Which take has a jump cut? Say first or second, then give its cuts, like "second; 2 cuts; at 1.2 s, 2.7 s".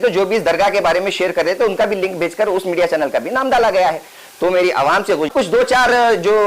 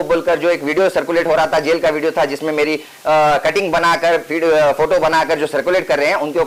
first; 1 cut; at 5.3 s